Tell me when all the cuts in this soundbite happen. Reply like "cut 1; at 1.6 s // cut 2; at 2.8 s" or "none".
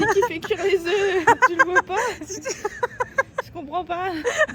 none